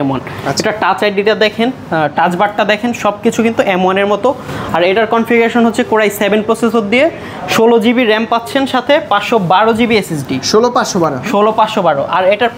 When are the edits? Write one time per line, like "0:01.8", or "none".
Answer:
none